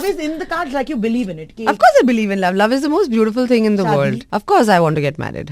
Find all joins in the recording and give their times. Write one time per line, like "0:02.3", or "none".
0:04.3

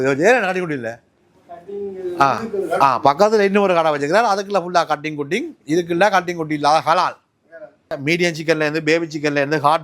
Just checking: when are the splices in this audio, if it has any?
0:08.0

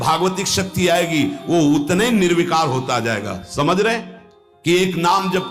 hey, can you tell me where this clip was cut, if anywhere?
0:04.5

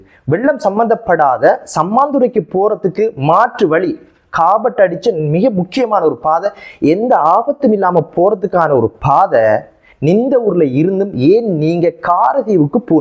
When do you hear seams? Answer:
none

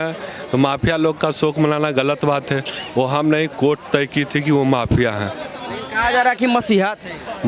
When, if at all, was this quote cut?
none

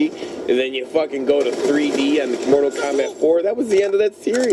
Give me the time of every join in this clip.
0:02.4

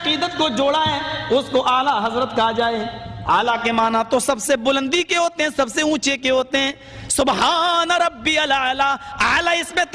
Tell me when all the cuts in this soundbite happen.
0:03.1

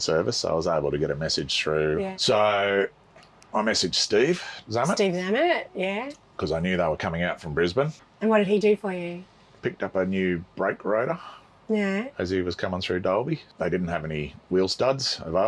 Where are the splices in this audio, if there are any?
0:08.0
0:13.5

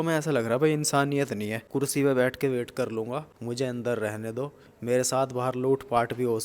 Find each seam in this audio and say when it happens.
0:01.6
0:03.3

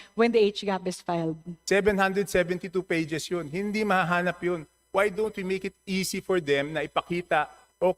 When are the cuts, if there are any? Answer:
0:01.5

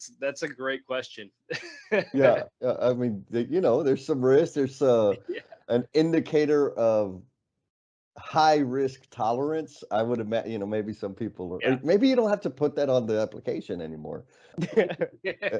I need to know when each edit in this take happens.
0:14.5

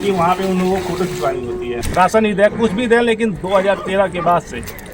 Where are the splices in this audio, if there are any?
0:01.8

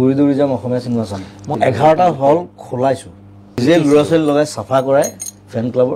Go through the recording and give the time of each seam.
0:01.5
0:03.6

